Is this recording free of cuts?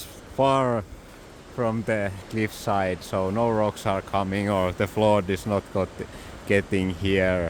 no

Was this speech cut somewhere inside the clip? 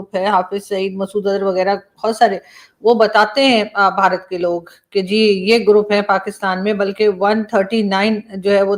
no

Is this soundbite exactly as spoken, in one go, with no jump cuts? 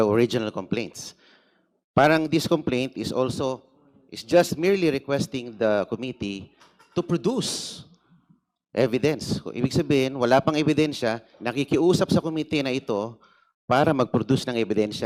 yes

